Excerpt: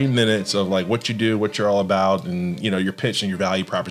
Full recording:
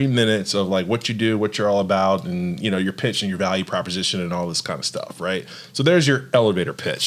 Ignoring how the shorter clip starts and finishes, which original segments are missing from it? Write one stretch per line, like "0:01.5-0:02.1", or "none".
none